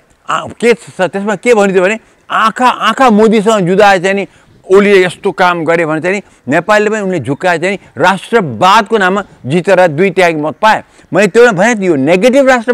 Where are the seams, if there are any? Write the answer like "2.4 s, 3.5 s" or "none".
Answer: none

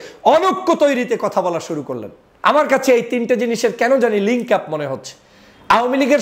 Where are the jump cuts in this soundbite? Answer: 2.3 s

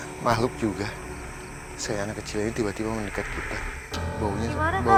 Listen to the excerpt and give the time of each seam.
none

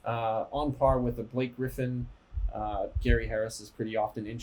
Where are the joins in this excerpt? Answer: none

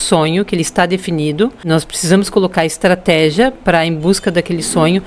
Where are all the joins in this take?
1.6 s

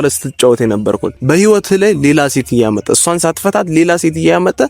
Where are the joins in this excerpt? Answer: 1.1 s

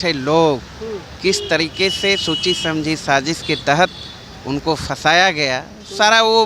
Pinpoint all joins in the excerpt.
none

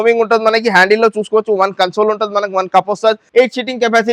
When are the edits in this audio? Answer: 3.2 s

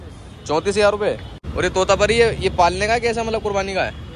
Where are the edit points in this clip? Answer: 1.4 s

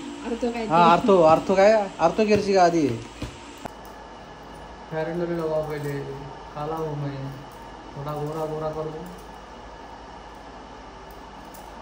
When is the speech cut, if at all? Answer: 3.5 s

